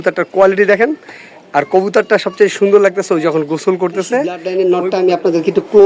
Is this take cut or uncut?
cut